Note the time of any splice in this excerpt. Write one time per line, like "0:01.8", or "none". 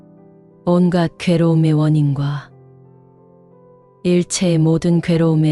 none